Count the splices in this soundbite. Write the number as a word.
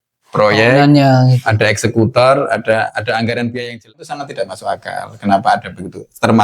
one